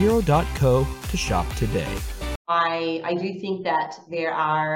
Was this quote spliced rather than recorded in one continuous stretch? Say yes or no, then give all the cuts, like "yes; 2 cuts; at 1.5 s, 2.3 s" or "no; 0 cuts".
yes; 1 cut; at 2.5 s